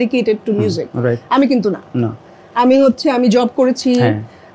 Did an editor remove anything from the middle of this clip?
no; 0 cuts

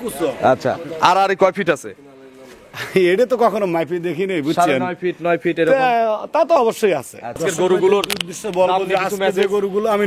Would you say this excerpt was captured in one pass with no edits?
no; 1 cut; at 7.4 s

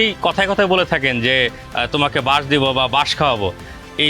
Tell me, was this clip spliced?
no; 0 cuts

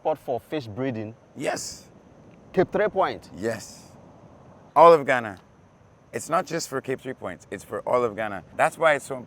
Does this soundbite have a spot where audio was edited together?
yes; 2 cuts; at 4.6 s, 8.4 s

